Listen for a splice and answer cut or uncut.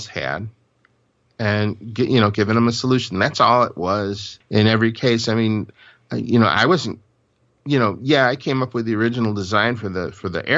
cut